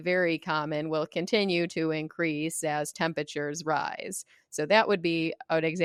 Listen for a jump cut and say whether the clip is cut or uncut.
uncut